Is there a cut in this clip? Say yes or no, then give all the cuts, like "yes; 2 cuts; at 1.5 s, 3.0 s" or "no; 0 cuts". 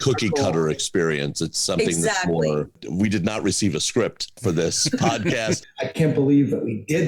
yes; 2 cuts; at 2.8 s, 5.7 s